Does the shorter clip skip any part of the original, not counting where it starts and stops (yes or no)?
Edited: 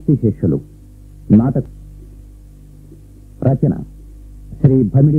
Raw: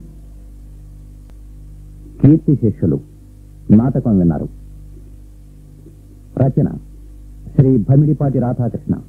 yes